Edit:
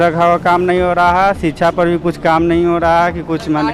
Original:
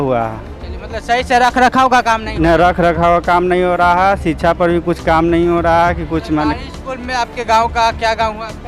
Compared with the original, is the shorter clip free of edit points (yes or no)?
yes